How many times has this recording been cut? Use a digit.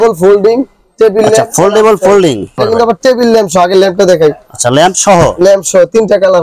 1